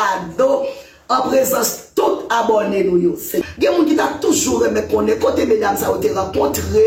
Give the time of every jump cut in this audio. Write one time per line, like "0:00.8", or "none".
0:03.4